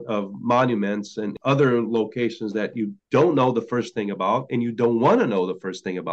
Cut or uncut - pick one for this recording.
cut